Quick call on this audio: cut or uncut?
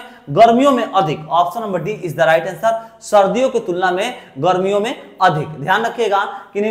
uncut